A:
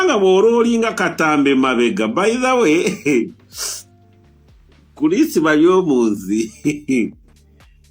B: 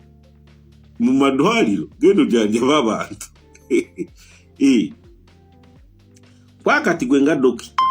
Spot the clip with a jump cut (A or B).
B